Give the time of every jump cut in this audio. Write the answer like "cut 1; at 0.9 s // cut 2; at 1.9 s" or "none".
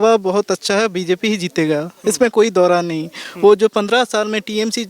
none